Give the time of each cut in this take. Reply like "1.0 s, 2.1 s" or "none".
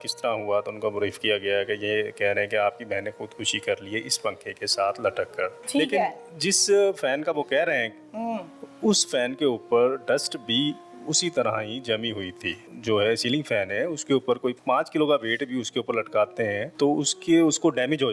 5.6 s, 12.7 s, 14.6 s, 16.7 s